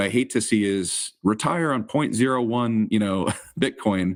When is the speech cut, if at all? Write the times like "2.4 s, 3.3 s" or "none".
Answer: none